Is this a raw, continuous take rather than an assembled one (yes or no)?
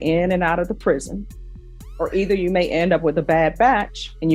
yes